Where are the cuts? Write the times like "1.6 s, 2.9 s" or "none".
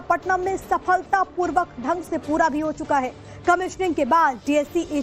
2.9 s